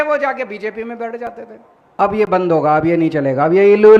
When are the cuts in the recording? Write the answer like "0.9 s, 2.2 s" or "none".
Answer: 2.0 s